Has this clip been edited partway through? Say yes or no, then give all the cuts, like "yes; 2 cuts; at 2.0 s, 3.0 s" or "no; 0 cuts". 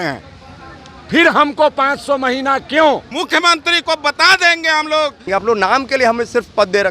yes; 2 cuts; at 3.1 s, 5.3 s